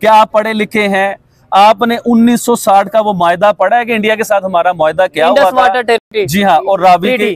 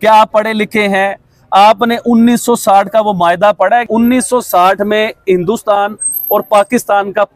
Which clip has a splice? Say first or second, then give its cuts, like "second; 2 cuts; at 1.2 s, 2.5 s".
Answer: second; 1 cut; at 3.9 s